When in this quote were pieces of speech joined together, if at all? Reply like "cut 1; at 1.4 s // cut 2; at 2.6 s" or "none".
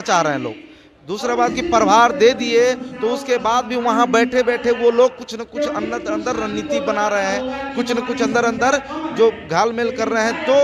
none